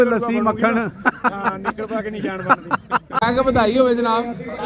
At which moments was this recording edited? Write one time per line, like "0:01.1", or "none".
0:03.2